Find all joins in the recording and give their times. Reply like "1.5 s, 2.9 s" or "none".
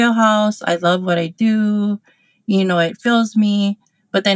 none